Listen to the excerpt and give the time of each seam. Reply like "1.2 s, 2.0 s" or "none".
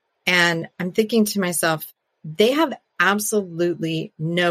none